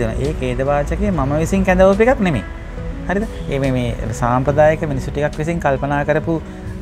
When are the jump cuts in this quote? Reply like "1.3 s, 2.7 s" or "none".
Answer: none